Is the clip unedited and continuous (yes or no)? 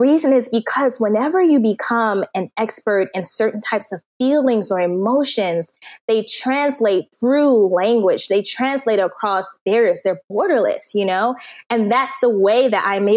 yes